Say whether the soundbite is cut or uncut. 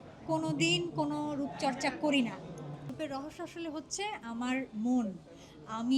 cut